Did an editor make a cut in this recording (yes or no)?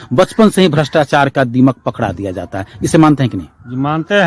no